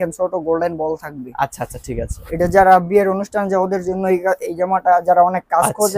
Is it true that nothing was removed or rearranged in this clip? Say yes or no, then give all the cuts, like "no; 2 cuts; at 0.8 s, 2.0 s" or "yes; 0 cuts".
yes; 0 cuts